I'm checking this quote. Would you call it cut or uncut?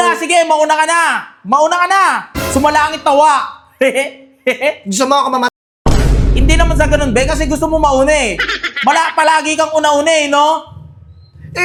uncut